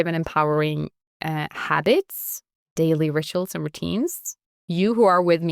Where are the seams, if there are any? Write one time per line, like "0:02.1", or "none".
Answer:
none